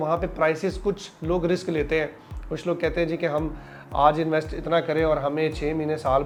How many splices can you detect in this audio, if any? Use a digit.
0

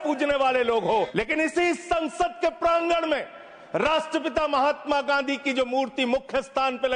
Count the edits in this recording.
1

